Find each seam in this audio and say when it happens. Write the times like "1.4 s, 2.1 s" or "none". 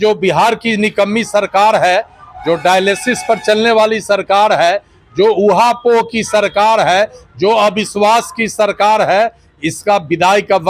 none